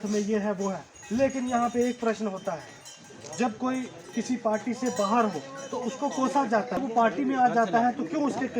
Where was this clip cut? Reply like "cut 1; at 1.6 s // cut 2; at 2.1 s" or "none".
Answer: cut 1; at 6.7 s